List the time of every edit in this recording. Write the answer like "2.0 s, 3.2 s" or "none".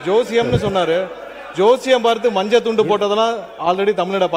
none